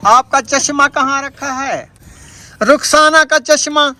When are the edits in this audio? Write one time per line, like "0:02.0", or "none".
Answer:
0:02.1